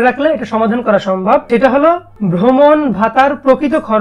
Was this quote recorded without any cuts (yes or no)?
no